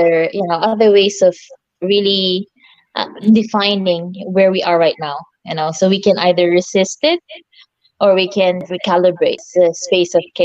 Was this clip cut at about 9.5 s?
yes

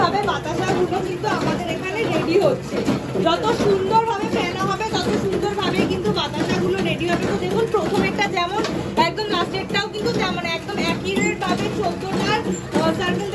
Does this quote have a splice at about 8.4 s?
no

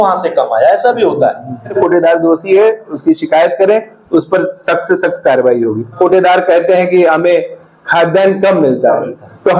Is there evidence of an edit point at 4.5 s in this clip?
no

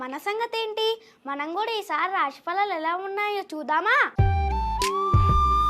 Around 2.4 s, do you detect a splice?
no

